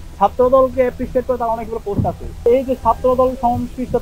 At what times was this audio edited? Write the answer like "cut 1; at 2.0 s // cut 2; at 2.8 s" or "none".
cut 1; at 2.5 s